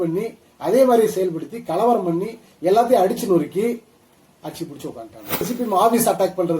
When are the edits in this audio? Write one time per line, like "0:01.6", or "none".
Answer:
0:05.5